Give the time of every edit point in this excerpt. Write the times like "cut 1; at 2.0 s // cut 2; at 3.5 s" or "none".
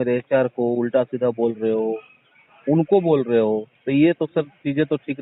none